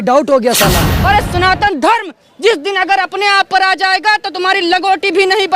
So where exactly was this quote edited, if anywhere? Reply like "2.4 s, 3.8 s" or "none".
0.9 s